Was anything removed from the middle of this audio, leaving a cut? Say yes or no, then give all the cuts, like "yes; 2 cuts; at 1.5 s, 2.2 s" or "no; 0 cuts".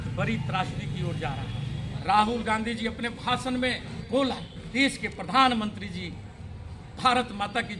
yes; 3 cuts; at 1.8 s, 3.9 s, 4.5 s